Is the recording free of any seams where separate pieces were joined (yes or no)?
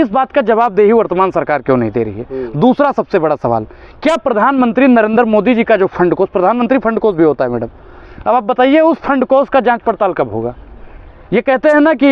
yes